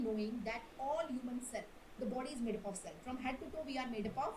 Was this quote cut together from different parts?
no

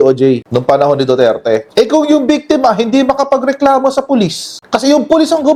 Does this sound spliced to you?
no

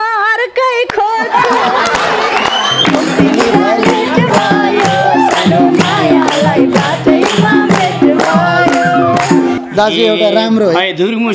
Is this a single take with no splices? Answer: no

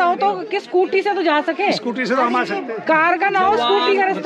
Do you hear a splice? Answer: no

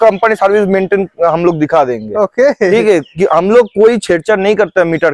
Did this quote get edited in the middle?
no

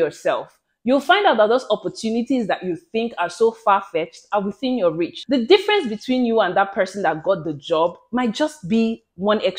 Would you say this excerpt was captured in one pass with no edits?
no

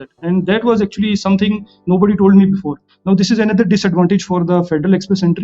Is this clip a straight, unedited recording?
no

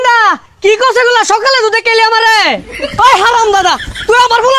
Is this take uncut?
no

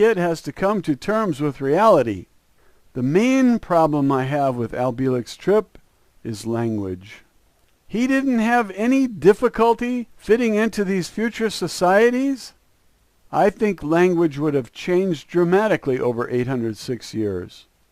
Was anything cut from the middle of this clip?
no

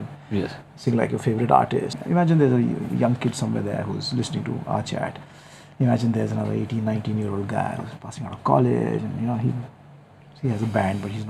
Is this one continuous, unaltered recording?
no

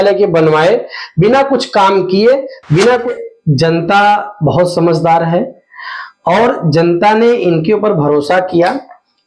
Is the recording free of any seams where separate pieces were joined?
no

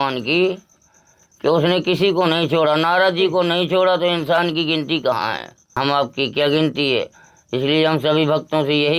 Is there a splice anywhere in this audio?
yes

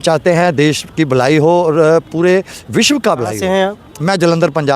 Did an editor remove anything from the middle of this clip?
yes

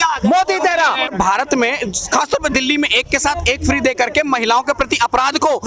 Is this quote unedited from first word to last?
no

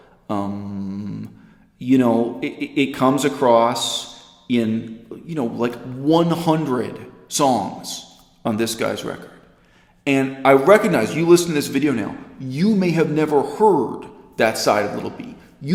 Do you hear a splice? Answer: no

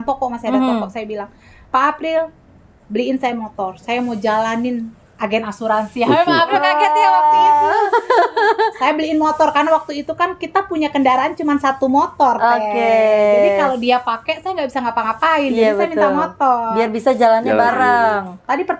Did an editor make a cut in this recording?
no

